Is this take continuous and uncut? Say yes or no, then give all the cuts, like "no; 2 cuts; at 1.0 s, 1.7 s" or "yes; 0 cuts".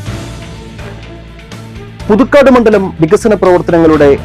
no; 1 cut; at 0.9 s